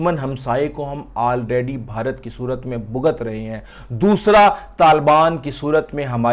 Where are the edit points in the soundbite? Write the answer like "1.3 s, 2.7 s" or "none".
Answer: none